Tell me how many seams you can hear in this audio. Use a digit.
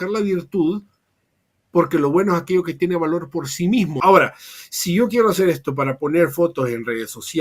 1